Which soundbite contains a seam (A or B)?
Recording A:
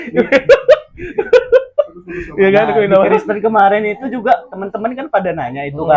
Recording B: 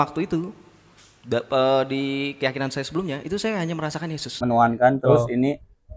B